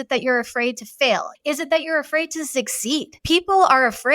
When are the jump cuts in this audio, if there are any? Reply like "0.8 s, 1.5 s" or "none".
1.3 s, 3.1 s